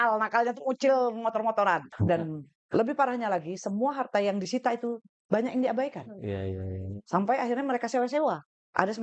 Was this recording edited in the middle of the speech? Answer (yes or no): yes